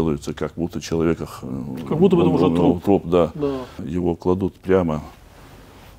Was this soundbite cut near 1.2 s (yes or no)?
no